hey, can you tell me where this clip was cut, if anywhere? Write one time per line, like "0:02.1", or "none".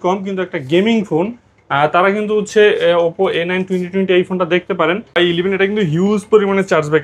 0:05.2